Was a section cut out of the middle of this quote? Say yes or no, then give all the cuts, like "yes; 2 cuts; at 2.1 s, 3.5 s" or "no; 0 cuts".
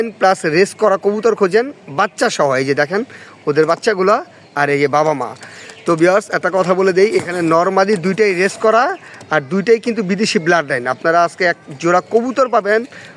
no; 0 cuts